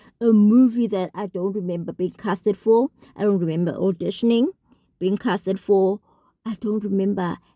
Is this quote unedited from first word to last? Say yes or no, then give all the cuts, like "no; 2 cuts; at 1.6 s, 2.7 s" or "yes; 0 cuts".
yes; 0 cuts